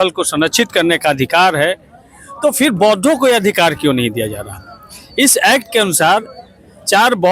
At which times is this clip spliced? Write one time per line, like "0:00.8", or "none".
none